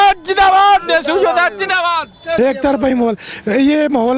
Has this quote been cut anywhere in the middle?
yes; 1 cut; at 2.4 s

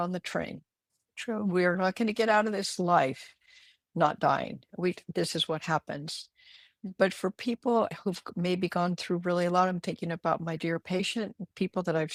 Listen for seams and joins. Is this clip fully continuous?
yes; 0 cuts

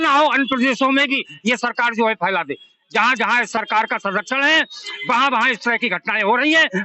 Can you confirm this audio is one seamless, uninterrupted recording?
yes; 0 cuts

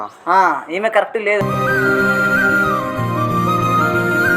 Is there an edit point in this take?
yes; 1 cut; at 1.4 s

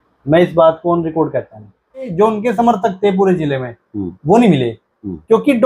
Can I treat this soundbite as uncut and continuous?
no; 1 cut; at 2.1 s

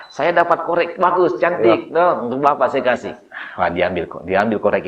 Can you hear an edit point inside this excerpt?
no; 0 cuts

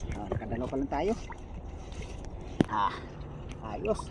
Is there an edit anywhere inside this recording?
yes; 1 cut; at 2.7 s

